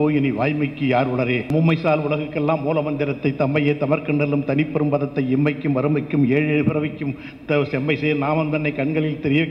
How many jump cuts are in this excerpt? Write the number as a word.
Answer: one